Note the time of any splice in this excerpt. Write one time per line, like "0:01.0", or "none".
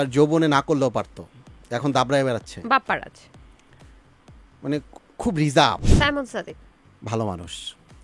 0:05.9